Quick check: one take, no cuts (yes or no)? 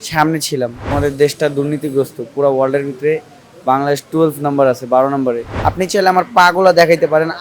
no